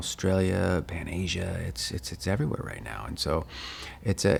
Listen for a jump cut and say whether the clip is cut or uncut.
uncut